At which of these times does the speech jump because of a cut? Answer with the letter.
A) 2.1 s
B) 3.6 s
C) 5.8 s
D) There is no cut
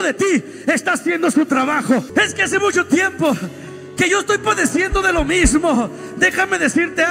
A